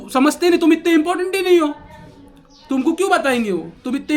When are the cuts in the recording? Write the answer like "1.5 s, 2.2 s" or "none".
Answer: none